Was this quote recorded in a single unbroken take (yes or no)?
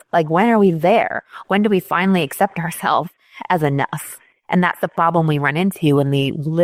yes